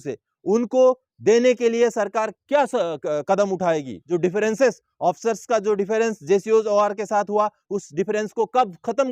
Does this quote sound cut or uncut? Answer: cut